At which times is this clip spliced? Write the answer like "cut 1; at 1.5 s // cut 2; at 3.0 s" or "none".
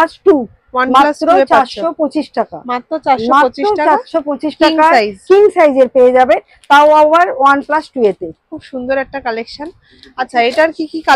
none